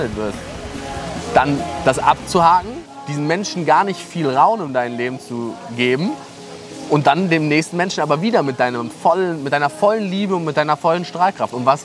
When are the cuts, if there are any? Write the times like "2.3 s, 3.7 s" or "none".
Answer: none